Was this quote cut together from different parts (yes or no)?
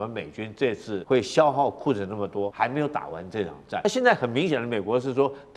yes